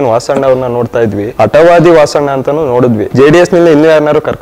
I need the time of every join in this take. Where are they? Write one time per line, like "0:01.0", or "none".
0:01.2
0:03.1